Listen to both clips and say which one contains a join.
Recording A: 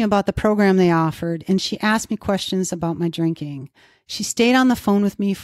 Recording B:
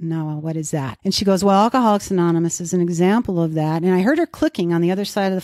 B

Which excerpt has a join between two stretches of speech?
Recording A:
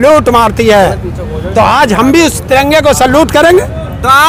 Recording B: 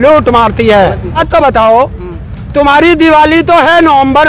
B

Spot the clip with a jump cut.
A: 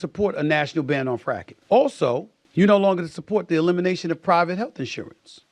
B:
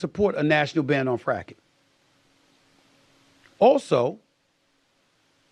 A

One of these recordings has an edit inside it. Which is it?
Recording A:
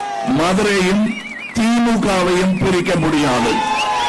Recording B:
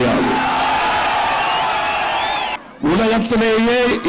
B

